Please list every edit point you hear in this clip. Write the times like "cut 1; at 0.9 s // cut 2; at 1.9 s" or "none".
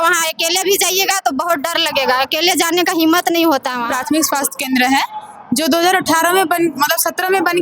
cut 1; at 3.8 s